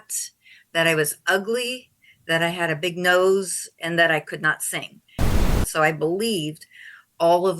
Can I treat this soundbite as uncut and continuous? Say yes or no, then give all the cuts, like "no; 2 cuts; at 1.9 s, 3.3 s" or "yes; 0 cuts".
no; 1 cut; at 5.4 s